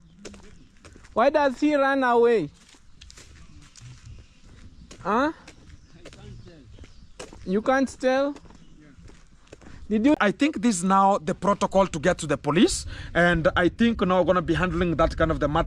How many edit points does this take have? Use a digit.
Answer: 1